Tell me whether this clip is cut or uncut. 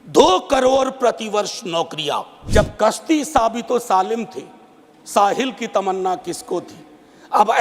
cut